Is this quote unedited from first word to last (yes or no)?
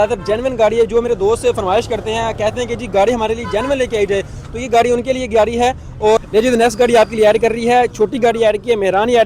no